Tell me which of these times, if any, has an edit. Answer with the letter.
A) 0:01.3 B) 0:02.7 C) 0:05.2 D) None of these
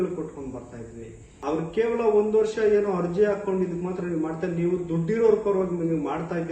A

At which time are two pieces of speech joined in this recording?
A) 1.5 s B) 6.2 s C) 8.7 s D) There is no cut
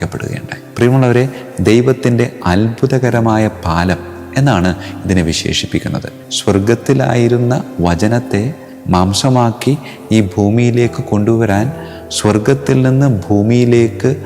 B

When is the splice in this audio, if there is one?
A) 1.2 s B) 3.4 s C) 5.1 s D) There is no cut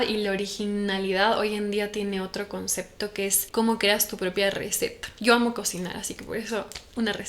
B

